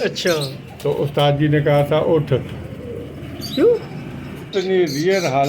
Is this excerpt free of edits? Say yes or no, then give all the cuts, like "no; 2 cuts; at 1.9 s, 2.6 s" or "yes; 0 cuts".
no; 1 cut; at 4.4 s